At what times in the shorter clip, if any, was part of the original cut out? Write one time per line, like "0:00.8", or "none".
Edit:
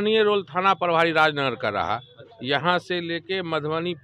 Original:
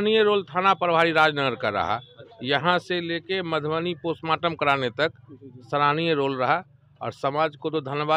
none